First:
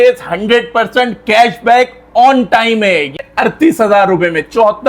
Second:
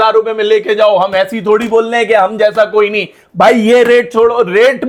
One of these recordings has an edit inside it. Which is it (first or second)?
first